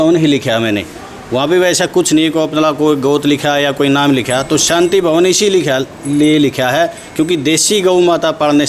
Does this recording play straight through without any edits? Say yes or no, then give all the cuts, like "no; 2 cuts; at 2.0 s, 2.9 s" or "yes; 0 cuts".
yes; 0 cuts